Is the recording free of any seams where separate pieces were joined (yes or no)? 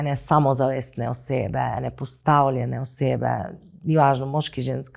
yes